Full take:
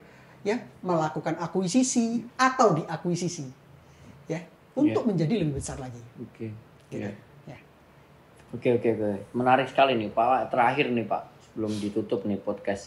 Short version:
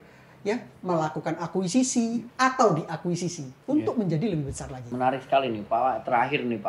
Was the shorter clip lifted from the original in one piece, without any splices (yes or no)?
no